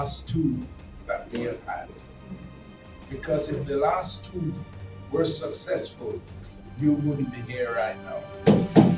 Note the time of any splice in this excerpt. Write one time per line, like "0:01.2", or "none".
none